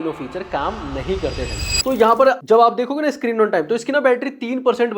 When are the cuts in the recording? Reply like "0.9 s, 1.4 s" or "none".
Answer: 1.7 s